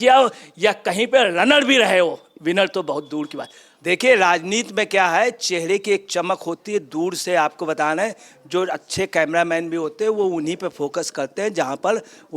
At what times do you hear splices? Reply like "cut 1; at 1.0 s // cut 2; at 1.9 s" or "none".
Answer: cut 1; at 3.7 s